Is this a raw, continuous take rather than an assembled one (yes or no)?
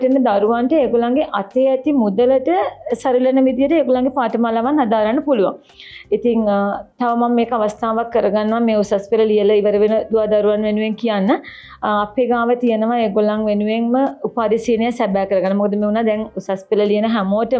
yes